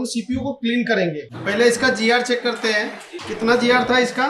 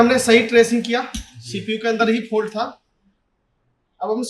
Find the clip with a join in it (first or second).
first